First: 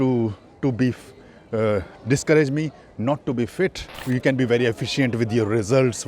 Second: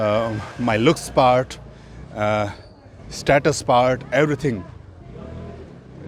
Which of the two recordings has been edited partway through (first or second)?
first